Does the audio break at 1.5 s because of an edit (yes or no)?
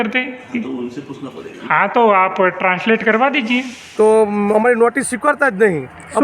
no